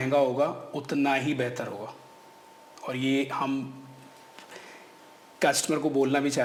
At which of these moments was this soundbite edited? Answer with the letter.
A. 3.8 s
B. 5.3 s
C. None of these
C